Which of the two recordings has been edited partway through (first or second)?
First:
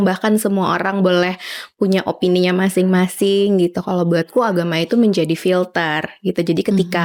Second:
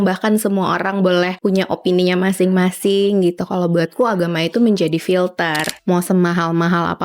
second